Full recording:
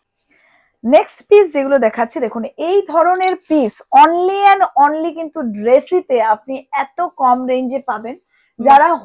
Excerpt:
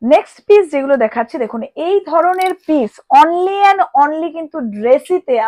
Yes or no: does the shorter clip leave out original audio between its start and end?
no